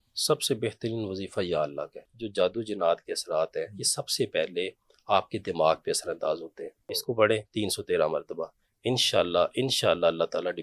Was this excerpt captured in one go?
no; 2 cuts; at 2.2 s, 7.0 s

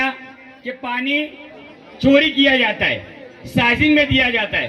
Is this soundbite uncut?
yes; 0 cuts

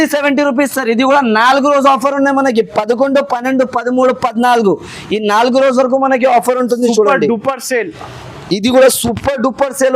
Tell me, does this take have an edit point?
no; 0 cuts

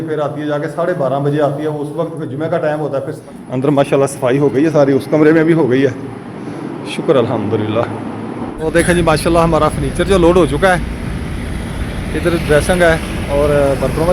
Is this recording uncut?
no; 2 cuts; at 3.2 s, 8.6 s

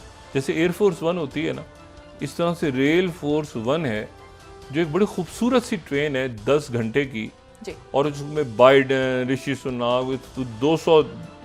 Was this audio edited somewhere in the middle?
no; 0 cuts

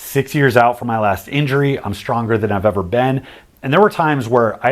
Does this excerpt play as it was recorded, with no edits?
yes; 0 cuts

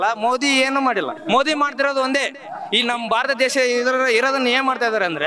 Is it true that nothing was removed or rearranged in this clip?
no; 1 cut; at 1.2 s

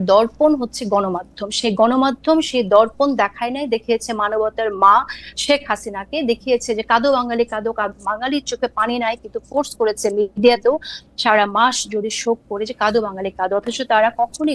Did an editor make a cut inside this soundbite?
no; 0 cuts

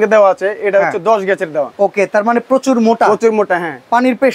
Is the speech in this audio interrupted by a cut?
no; 0 cuts

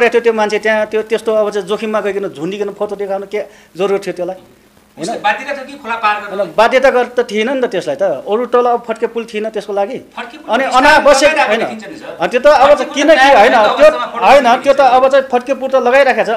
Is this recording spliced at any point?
no; 0 cuts

